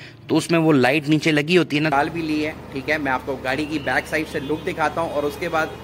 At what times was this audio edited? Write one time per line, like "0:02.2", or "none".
0:01.9